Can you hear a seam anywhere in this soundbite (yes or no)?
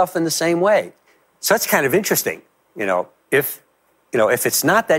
no